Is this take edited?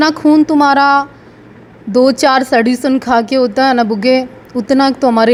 no; 0 cuts

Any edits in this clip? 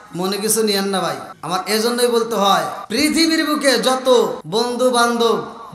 yes; 3 cuts; at 1.3 s, 2.8 s, 4.4 s

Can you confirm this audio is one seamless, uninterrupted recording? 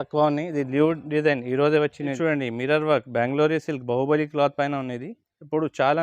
no; 1 cut; at 2.1 s

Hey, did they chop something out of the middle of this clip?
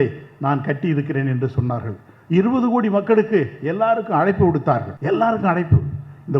yes; 1 cut; at 4.9 s

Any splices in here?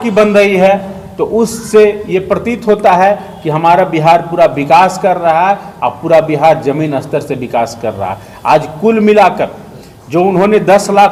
no; 0 cuts

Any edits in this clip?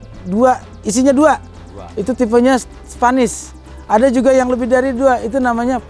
no; 0 cuts

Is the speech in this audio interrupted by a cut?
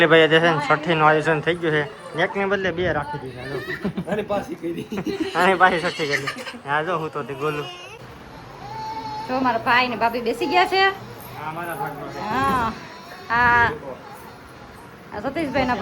yes; 1 cut; at 8.1 s

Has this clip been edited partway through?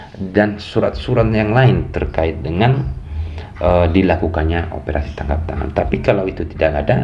no; 0 cuts

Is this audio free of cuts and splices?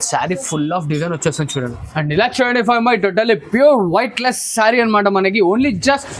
no; 1 cut; at 1.8 s

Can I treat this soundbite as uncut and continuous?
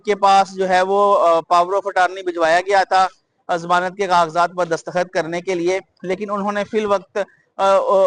yes; 0 cuts

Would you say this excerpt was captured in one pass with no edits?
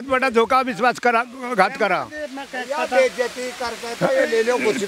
yes; 0 cuts

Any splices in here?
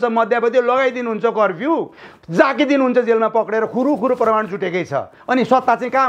no; 0 cuts

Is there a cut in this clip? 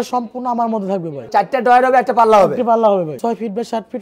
yes; 2 cuts; at 1.2 s, 3.2 s

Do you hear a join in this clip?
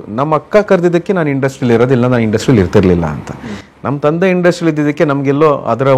no; 0 cuts

